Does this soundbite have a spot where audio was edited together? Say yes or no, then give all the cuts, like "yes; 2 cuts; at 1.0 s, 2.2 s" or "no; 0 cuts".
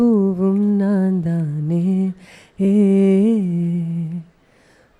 no; 0 cuts